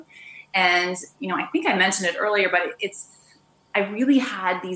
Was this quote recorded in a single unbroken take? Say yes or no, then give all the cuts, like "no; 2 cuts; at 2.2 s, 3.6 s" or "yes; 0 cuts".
yes; 0 cuts